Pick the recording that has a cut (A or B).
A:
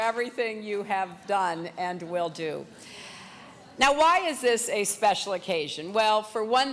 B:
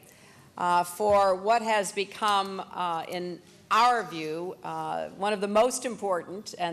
A